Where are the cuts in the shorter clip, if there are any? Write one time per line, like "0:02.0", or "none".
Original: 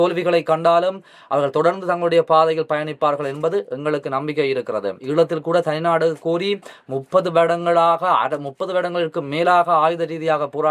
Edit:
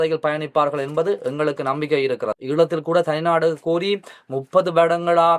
0:02.4